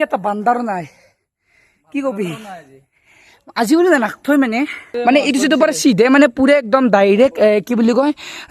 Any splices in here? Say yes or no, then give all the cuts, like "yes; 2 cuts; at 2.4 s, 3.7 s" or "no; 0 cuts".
yes; 1 cut; at 4.8 s